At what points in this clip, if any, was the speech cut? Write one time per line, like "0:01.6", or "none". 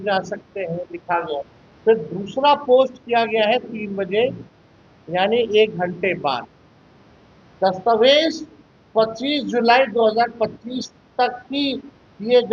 0:01.6